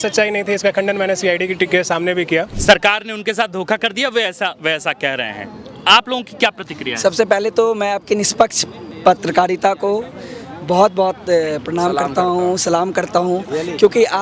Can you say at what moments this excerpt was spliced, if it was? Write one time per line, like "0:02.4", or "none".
0:02.5